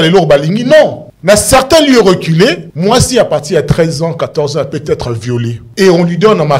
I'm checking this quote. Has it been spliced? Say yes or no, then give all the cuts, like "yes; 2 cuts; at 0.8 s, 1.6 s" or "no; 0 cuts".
yes; 3 cuts; at 1.1 s, 2.7 s, 5.6 s